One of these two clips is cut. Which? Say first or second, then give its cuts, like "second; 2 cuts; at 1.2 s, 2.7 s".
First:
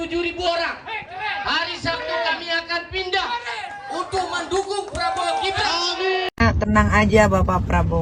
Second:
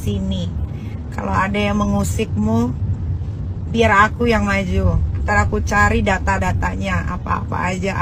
first; 1 cut; at 6.3 s